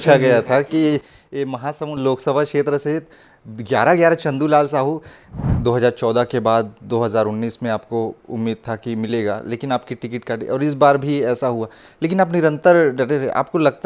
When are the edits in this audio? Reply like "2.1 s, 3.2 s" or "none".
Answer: 5.3 s